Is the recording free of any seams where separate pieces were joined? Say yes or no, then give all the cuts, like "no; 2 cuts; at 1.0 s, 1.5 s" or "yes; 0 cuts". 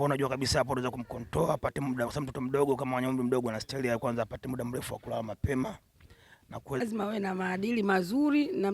no; 1 cut; at 6.8 s